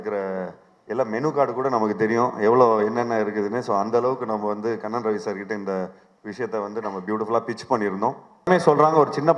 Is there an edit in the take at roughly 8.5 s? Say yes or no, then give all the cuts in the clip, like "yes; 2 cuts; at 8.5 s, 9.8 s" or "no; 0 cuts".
yes; 1 cut; at 8.5 s